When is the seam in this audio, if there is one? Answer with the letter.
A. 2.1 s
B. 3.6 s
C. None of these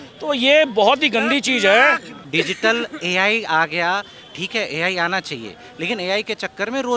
A